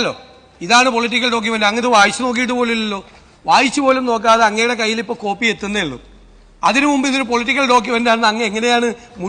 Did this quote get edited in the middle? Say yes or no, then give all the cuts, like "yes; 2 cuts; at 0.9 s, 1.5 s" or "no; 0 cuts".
no; 0 cuts